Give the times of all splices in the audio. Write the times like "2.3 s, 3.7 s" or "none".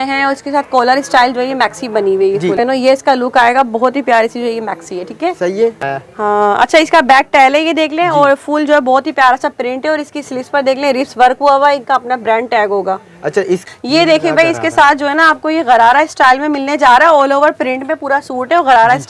2.6 s, 5.8 s, 13.6 s